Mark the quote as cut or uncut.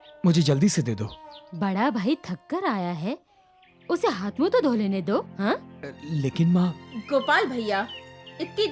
uncut